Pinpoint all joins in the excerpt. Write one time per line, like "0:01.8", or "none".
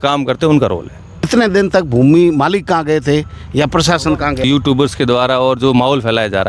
0:01.3
0:04.4